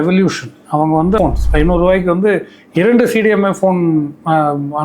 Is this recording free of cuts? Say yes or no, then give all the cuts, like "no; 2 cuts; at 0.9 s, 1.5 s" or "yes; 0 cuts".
no; 1 cut; at 1.2 s